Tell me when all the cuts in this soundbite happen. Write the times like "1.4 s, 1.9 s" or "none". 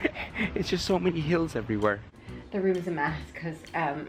2.3 s